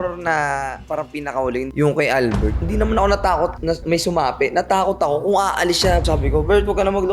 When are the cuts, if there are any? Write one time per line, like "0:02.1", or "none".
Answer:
0:01.7
0:02.6
0:06.1